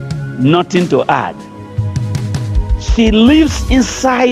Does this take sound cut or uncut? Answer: uncut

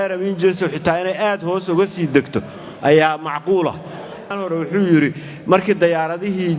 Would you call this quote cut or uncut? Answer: cut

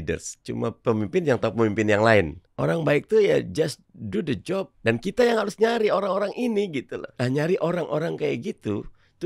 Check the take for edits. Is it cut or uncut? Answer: cut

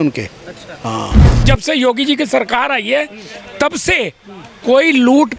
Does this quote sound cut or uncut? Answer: cut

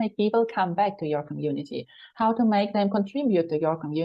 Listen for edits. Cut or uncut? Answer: uncut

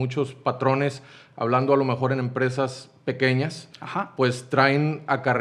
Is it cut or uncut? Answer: uncut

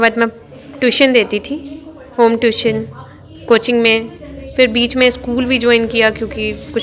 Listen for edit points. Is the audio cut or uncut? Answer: uncut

